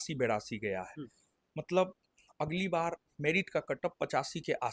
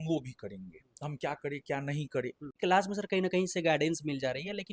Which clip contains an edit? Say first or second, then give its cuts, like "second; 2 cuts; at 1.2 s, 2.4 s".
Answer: second; 1 cut; at 2.5 s